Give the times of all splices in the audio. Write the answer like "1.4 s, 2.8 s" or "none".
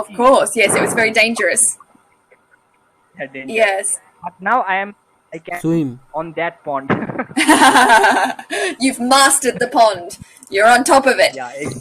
4.0 s